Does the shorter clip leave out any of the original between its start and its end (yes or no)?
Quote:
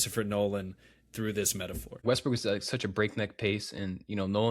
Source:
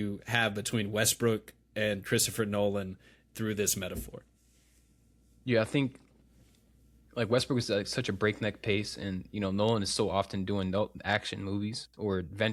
yes